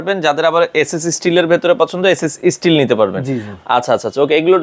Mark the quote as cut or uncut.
uncut